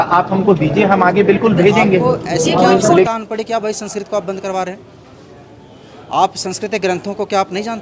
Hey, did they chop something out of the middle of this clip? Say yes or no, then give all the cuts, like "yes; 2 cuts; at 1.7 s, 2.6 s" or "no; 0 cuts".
yes; 1 cut; at 3.1 s